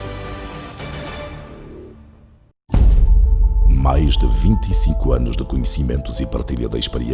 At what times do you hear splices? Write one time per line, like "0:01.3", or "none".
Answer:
0:02.7